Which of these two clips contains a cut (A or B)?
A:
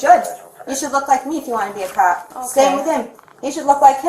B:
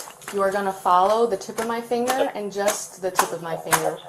A